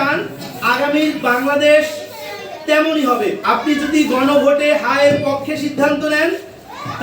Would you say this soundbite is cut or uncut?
cut